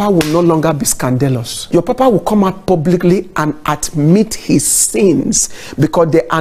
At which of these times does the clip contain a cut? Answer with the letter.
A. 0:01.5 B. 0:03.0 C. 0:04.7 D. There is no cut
A